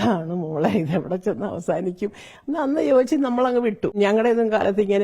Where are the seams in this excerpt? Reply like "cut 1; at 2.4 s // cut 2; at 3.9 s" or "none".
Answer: cut 1; at 3.9 s